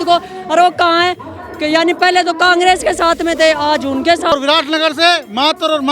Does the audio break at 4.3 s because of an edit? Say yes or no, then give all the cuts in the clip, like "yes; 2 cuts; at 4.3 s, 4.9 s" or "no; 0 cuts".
yes; 1 cut; at 4.3 s